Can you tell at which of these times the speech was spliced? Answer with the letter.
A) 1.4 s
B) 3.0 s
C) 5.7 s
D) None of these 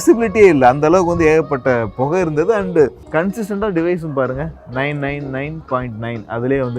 B